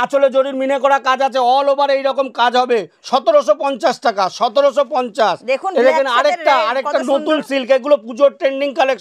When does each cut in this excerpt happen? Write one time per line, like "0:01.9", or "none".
none